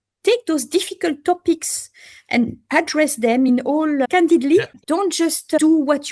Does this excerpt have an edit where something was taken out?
yes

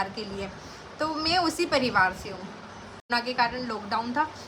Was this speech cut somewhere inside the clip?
yes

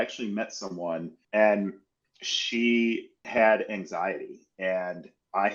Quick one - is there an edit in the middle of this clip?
yes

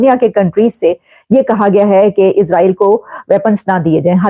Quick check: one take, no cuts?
yes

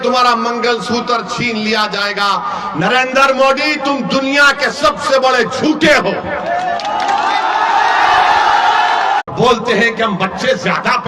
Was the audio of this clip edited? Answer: yes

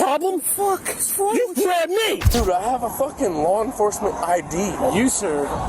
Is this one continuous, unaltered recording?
no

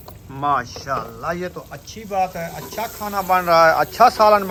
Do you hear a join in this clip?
no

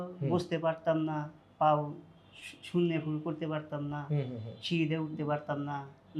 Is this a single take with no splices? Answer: yes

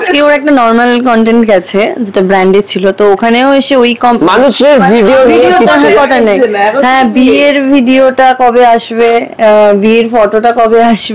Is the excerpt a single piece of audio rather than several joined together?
yes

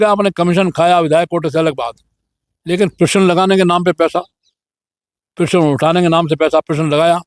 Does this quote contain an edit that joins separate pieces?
no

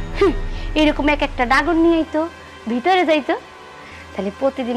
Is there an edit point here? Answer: no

